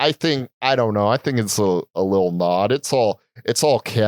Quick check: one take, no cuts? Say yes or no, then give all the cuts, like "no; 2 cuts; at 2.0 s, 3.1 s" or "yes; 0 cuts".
yes; 0 cuts